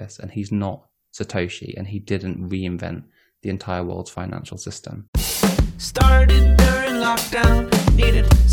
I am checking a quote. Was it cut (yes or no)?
yes